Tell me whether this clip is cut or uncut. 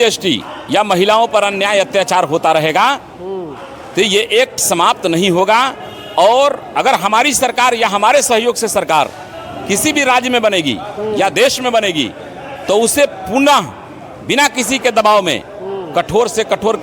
uncut